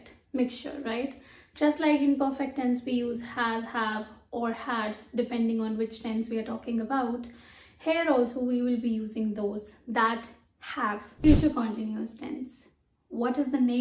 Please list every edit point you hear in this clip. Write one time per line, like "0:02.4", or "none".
0:11.1